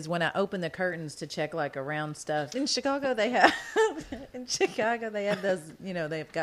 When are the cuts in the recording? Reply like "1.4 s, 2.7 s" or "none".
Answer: 2.5 s